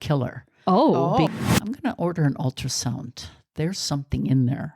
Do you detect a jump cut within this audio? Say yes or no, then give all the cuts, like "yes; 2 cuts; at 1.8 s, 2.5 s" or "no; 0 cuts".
yes; 1 cut; at 1.3 s